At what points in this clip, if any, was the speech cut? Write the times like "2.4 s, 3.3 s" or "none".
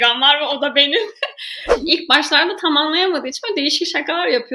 1.7 s

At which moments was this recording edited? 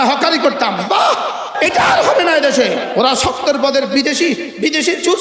1.5 s, 2.9 s

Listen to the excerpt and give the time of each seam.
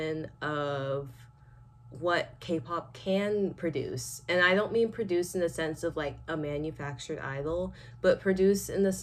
none

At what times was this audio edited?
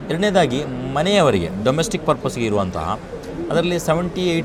none

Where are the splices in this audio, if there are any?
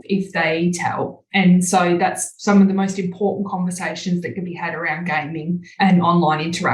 1.2 s, 5.7 s

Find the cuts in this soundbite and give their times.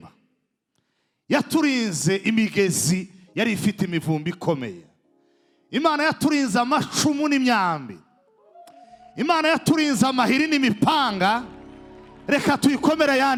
none

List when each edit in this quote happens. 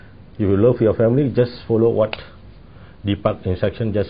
none

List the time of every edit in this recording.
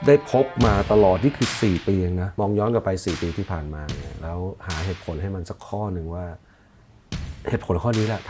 2.2 s

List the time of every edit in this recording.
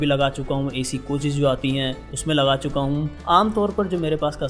3.1 s

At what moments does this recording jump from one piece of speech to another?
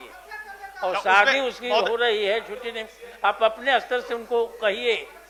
none

